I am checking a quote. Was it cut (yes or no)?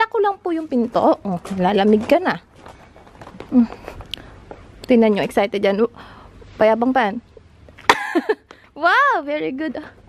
no